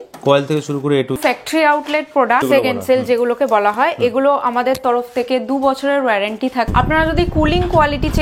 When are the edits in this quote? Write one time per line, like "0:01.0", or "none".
0:01.2
0:02.4
0:06.7